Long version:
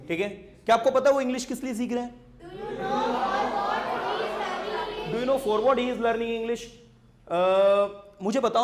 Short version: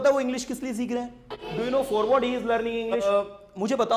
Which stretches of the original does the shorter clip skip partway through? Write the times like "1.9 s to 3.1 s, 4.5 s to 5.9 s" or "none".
2.4 s to 4.9 s, 6.6 s to 7.7 s